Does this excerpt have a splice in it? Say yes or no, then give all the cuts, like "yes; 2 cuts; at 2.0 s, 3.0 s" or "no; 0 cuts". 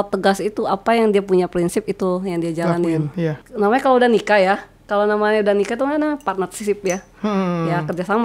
yes; 1 cut; at 3.4 s